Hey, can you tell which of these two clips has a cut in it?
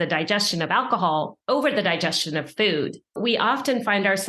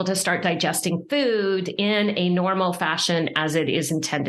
first; 2 cuts; at 1.4 s, 3.1 s

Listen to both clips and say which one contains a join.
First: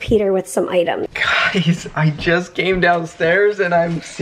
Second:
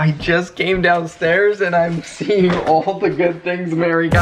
first; 1 cut; at 1.1 s

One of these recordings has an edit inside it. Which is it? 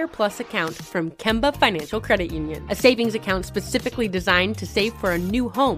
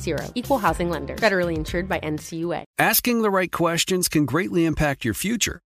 second; 1 cut; at 2.7 s

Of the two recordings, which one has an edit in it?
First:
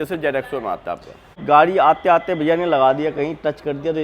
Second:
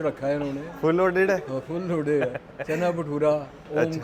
first; 1 cut; at 1.4 s

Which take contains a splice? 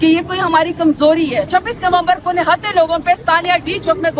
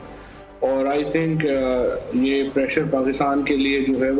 first; 1 cut; at 1.5 s

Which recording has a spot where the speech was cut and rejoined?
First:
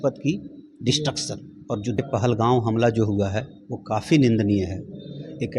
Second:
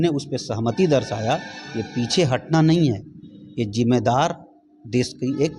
first; 1 cut; at 1.9 s

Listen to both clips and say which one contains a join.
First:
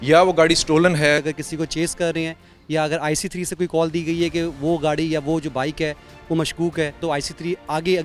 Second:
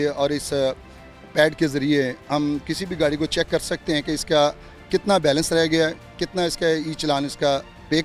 first; 2 cuts; at 1.2 s, 7.0 s

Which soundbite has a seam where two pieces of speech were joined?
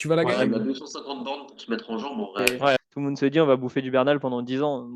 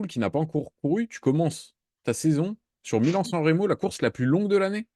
first; 1 cut; at 2.6 s

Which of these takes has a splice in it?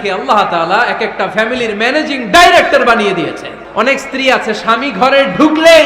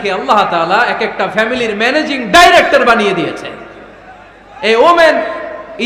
first; 1 cut; at 3.5 s

